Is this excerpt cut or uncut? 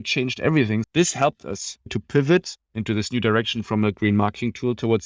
cut